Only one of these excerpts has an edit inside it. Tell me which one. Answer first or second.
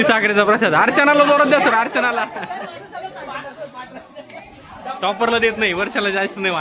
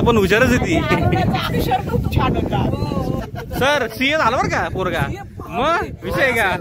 second